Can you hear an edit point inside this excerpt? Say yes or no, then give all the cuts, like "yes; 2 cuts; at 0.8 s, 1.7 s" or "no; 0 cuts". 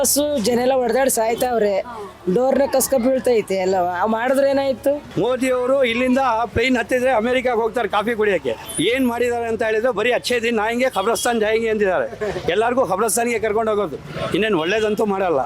yes; 2 cuts; at 5.1 s, 8.6 s